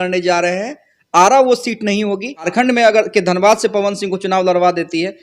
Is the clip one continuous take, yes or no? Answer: no